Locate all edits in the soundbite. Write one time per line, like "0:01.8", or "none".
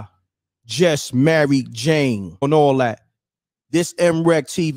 none